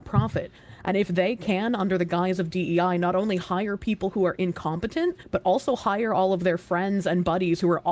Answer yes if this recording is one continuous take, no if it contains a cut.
no